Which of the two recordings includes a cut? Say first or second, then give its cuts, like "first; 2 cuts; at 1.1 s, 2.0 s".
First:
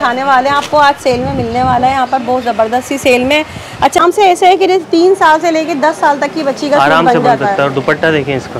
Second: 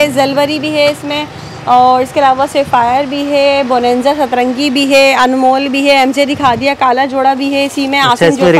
first; 1 cut; at 4.0 s